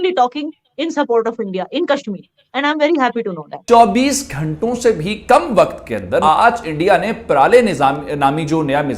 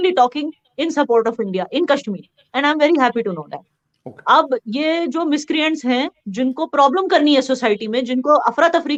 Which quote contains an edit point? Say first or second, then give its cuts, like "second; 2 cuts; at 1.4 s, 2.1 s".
first; 2 cuts; at 3.6 s, 6.2 s